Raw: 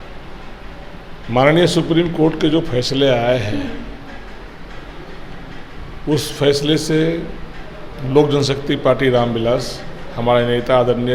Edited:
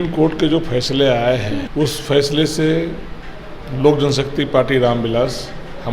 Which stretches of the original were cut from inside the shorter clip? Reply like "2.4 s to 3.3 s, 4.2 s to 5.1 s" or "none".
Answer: 3.7 s to 6.0 s